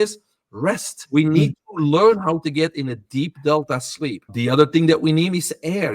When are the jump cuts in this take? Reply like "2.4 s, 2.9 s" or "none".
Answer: 0.9 s, 4.2 s